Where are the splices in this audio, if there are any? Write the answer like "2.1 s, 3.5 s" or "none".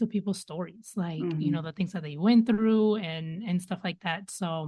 none

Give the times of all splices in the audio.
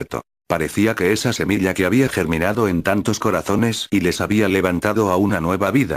4.9 s

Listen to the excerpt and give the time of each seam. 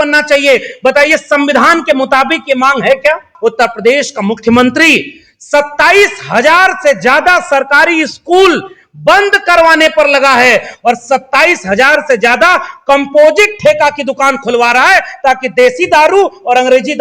3.3 s

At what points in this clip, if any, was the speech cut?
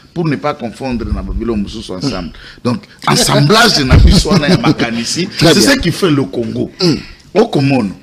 none

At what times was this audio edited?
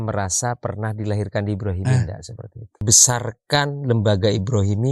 2.8 s

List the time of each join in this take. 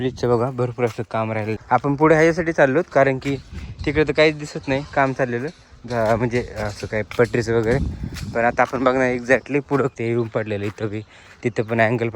1.6 s, 10.0 s

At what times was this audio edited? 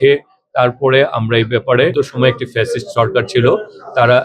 1.9 s

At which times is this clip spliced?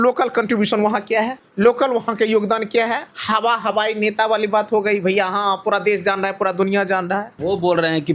1.4 s, 3.1 s, 7.4 s

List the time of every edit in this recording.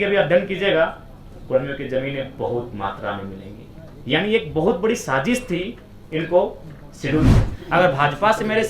7.3 s

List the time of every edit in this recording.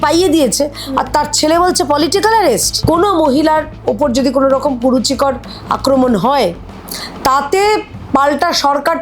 2.7 s

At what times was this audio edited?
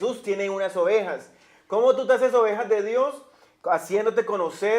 2.0 s

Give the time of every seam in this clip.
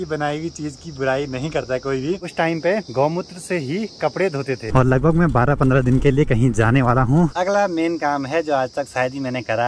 2.4 s, 4.7 s, 7.3 s

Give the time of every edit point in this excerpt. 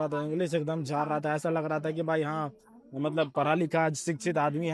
none

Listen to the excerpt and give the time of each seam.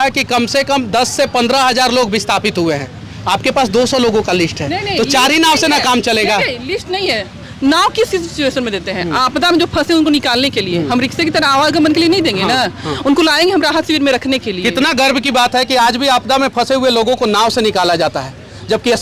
none

